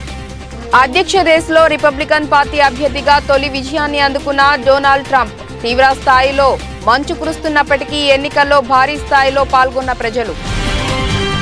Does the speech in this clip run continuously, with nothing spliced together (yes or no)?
no